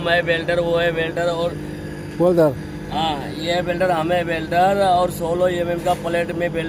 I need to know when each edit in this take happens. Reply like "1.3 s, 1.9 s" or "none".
none